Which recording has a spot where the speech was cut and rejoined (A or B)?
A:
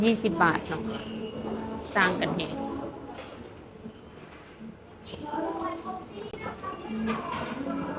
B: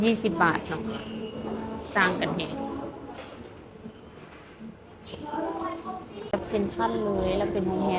B